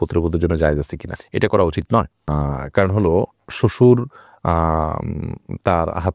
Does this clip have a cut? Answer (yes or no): no